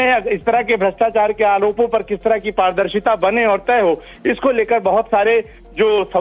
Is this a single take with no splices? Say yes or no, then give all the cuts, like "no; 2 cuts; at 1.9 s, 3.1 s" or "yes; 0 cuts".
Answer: yes; 0 cuts